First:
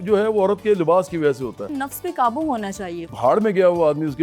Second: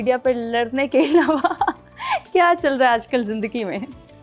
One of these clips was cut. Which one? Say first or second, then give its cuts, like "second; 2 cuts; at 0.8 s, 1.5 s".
first; 2 cuts; at 1.6 s, 3.1 s